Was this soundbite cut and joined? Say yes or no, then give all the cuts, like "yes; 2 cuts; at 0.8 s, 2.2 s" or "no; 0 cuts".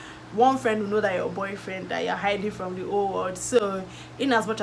no; 0 cuts